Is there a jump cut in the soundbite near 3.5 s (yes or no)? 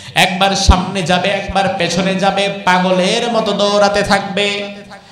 no